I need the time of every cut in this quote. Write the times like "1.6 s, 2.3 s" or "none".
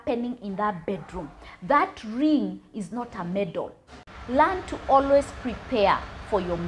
3.8 s